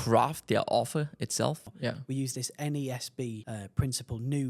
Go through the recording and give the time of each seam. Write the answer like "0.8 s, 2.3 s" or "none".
1.6 s, 3.4 s